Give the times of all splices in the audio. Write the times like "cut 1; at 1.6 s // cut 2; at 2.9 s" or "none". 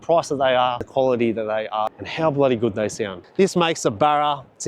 cut 1; at 0.9 s // cut 2; at 2.0 s // cut 3; at 3.1 s